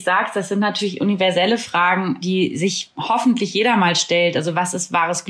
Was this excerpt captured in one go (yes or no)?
no